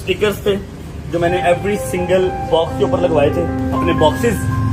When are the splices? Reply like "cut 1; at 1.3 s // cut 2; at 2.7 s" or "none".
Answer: cut 1; at 3.6 s